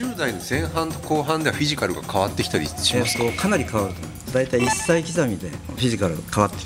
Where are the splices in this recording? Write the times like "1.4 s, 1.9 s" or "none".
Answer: 4.3 s, 5.7 s